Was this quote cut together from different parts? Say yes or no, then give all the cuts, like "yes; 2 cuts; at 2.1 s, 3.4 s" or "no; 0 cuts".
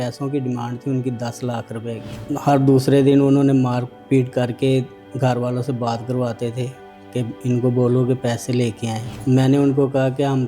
yes; 1 cut; at 2.1 s